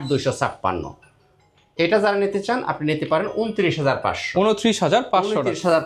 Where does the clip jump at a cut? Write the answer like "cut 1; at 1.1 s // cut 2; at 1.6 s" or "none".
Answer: none